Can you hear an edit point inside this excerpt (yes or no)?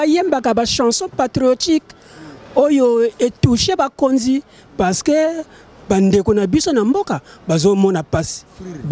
no